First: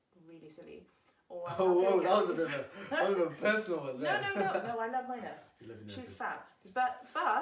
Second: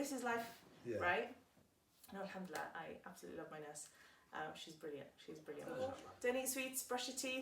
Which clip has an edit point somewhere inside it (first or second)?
second